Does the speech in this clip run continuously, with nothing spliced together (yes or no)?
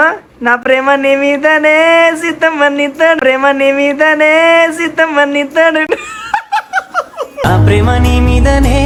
yes